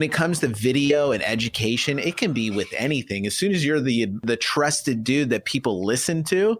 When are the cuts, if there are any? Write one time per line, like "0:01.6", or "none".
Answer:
none

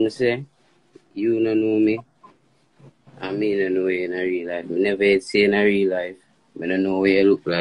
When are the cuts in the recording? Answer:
none

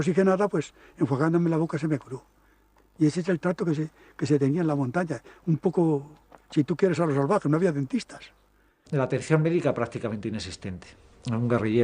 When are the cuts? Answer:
none

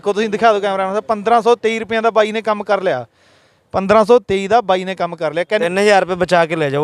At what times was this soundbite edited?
0:05.6

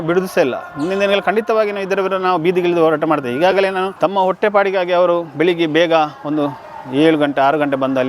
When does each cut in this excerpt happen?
0:03.9

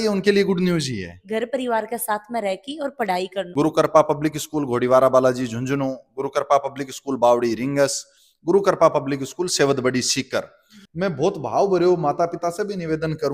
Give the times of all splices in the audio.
0:01.2
0:03.5
0:10.8

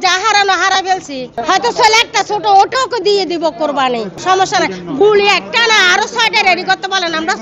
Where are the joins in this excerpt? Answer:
0:01.4
0:04.1

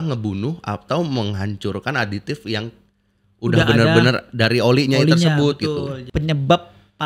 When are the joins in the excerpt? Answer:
0:06.0

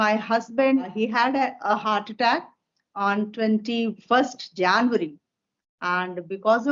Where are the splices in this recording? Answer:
0:00.9

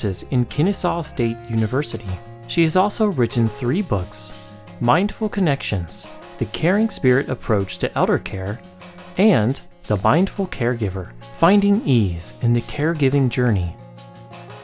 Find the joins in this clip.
0:13.8

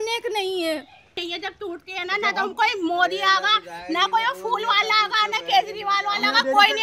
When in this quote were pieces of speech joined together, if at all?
0:01.2

